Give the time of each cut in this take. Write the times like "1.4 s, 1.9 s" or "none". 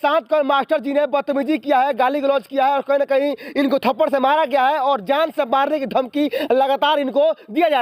none